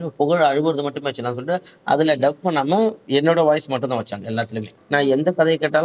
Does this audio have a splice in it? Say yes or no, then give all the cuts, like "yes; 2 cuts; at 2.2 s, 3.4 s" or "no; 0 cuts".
yes; 1 cut; at 4.7 s